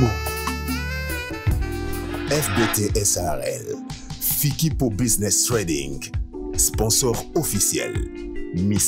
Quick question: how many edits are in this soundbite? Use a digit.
0